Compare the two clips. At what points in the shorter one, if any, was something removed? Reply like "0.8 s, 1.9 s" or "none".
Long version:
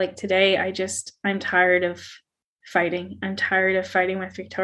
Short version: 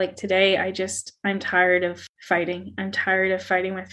2.1 s